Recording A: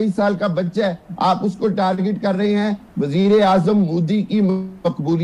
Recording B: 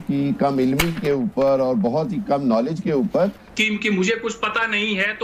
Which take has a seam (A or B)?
B